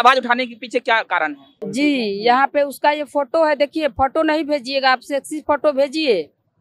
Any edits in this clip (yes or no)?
yes